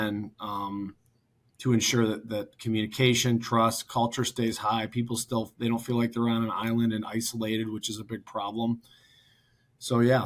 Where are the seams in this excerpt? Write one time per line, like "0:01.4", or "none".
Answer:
none